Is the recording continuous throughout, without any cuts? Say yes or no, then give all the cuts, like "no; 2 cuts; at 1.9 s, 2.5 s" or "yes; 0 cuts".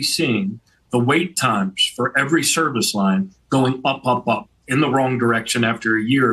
yes; 0 cuts